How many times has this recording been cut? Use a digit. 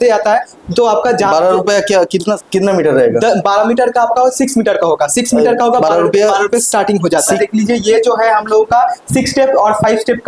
2